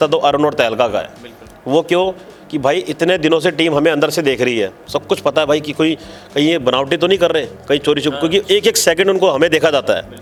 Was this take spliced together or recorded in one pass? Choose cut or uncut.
uncut